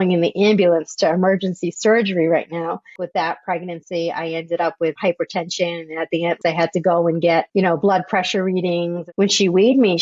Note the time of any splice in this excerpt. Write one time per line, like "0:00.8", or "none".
0:02.8
0:05.0
0:06.4
0:09.0